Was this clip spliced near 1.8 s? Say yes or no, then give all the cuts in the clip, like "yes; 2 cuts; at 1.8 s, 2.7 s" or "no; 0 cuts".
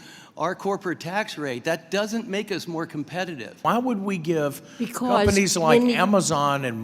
no; 1 cut; at 3.5 s